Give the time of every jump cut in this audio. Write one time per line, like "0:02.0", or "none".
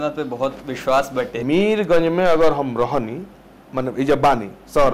0:01.4